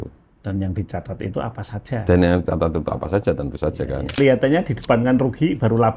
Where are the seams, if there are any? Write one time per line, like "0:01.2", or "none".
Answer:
0:04.2

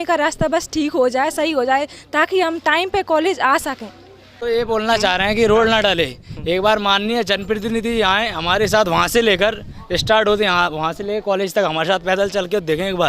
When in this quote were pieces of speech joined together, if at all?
0:04.3

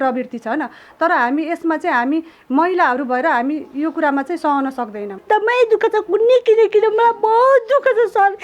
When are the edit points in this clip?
0:05.2

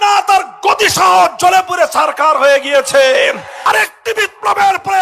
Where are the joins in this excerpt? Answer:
0:03.5

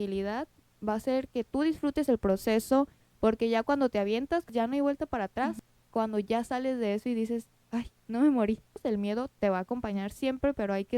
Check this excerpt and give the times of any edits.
0:03.0
0:04.5
0:05.6
0:08.7

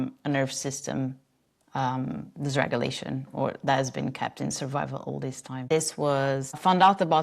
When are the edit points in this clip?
0:05.6

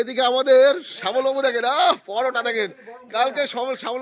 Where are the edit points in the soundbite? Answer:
none

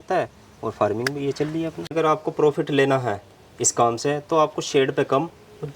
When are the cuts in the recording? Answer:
0:01.9

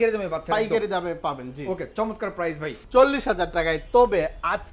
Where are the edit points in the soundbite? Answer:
0:02.7

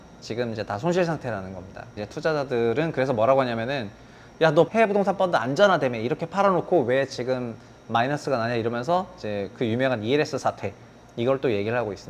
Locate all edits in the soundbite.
0:02.0
0:04.7

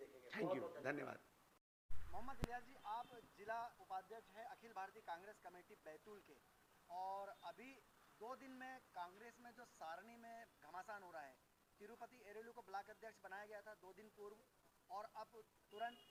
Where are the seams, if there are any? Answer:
none

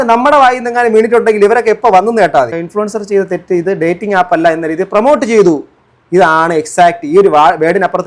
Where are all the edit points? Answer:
0:02.6

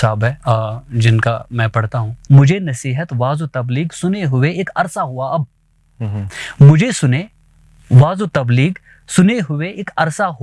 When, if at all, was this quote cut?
0:02.2

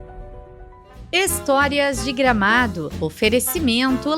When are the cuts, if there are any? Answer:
0:01.1

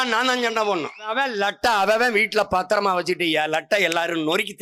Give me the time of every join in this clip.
0:01.1

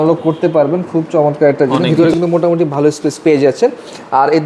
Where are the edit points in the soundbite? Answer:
0:01.8

